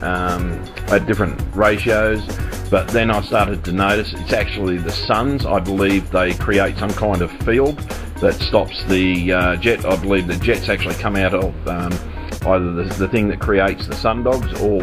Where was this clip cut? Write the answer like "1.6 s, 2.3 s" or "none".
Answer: 1.5 s